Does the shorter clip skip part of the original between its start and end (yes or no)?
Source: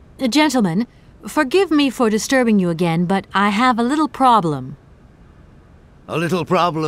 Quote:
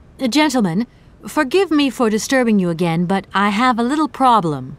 no